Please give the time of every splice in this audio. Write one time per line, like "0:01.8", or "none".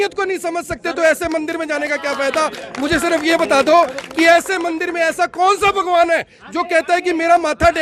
none